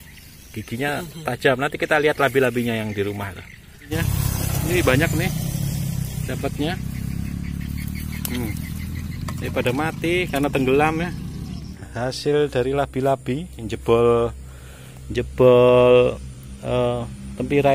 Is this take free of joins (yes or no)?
no